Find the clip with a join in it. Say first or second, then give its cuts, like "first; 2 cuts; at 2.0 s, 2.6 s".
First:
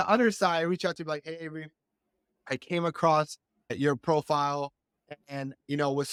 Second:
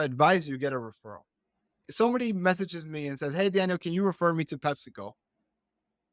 second; 1 cut; at 1.8 s